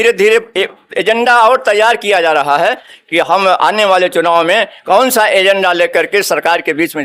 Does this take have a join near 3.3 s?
no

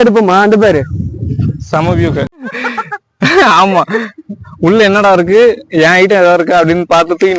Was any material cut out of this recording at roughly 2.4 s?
yes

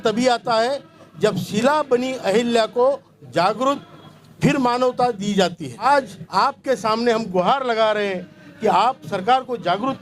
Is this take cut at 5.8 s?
yes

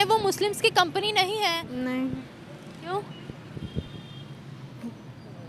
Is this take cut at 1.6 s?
yes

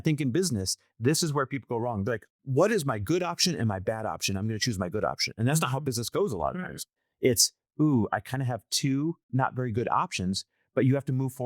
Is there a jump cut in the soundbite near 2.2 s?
yes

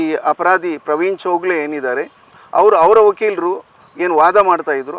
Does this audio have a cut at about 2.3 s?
no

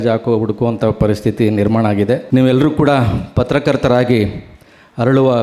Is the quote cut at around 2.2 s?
yes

